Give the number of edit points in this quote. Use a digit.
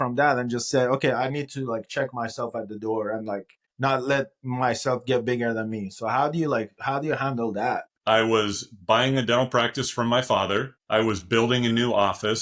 1